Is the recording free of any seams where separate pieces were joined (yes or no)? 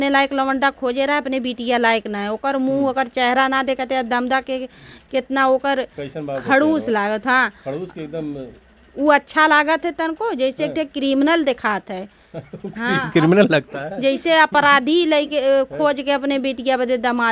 yes